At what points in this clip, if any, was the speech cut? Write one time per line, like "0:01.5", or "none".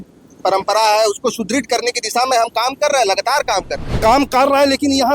0:03.9